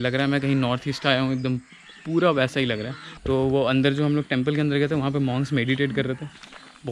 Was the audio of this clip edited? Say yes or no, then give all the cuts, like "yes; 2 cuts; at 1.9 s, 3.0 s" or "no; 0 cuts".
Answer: no; 0 cuts